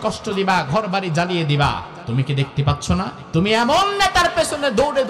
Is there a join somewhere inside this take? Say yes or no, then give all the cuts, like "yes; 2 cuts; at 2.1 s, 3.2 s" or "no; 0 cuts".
yes; 2 cuts; at 1.9 s, 3.2 s